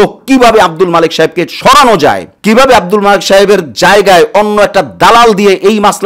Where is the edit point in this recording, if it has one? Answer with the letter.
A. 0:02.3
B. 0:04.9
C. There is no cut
A